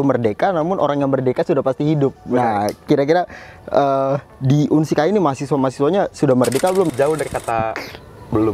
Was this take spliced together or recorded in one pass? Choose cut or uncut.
cut